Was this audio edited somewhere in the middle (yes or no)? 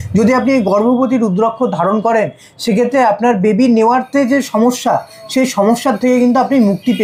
no